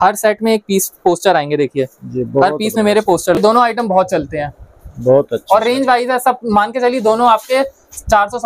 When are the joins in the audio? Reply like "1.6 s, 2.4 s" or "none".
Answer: 3.4 s